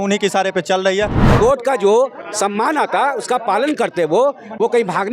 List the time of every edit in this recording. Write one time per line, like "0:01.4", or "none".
0:01.2